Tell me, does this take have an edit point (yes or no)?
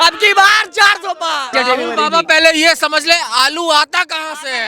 yes